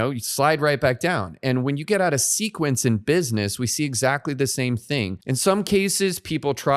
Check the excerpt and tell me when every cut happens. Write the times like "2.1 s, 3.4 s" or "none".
5.2 s